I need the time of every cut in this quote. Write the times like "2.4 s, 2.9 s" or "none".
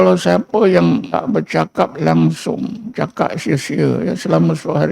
1.1 s